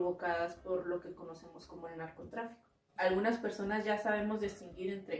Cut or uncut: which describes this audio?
cut